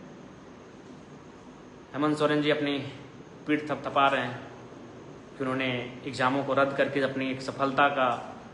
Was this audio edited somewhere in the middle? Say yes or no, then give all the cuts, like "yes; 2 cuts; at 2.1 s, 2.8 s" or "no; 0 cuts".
no; 0 cuts